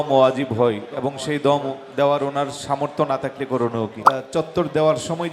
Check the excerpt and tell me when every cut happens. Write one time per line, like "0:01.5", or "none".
0:04.0